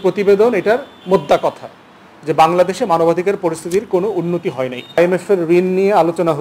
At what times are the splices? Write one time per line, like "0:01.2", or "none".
0:05.0